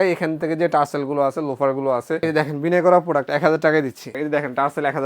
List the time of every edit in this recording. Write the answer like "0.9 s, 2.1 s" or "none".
2.2 s, 4.2 s